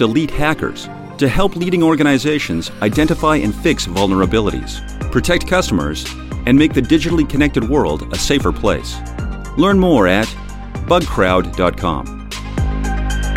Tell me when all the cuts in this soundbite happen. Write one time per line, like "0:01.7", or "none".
0:12.3